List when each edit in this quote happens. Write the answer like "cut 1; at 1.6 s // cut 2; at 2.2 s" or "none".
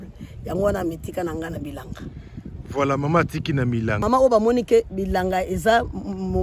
cut 1; at 4.0 s